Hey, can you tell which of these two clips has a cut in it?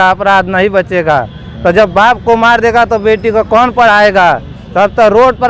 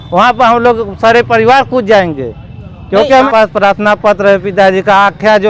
second; 1 cut; at 3.3 s

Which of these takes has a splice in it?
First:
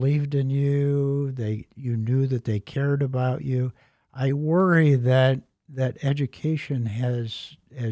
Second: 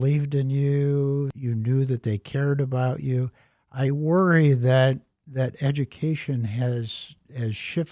second; 1 cut; at 1.3 s

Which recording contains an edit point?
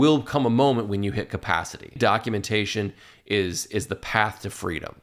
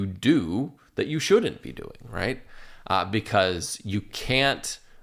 first; 1 cut; at 1.9 s

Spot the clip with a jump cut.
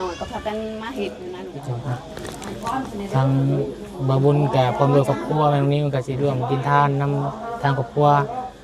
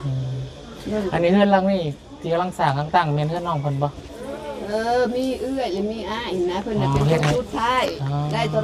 first; 1 cut; at 1.4 s

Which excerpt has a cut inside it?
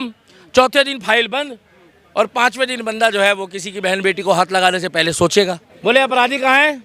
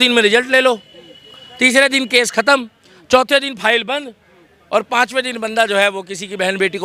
first; 1 cut; at 5.7 s

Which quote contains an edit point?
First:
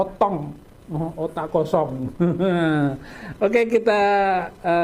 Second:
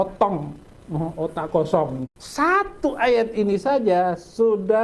second; 1 cut; at 2.0 s

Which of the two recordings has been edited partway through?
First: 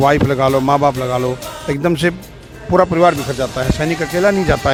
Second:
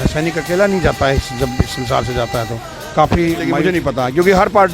second; 1 cut; at 3.6 s

